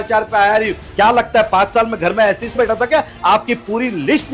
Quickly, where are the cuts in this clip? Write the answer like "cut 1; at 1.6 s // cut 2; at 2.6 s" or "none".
cut 1; at 2.6 s